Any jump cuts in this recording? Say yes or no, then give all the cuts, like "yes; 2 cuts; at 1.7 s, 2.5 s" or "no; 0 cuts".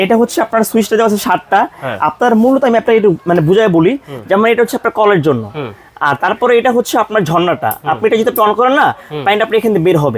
no; 0 cuts